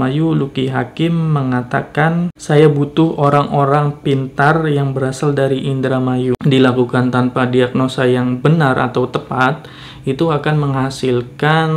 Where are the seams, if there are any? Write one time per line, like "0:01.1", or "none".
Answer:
0:02.4
0:06.4